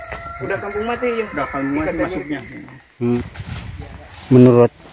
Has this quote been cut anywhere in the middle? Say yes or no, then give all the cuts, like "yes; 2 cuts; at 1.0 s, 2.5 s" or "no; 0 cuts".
yes; 1 cut; at 3.2 s